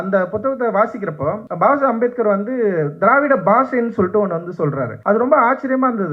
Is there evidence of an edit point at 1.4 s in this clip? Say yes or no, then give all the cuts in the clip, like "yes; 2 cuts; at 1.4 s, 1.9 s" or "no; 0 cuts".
yes; 2 cuts; at 1.4 s, 4.9 s